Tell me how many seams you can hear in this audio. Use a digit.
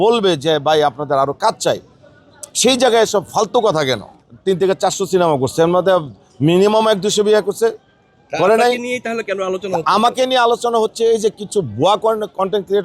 1